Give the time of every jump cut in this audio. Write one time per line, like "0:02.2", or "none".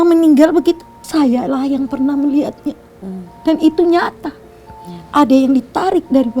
0:00.9